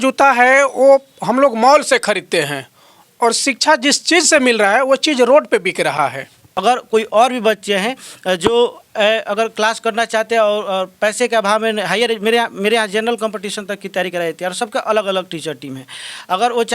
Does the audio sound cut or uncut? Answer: cut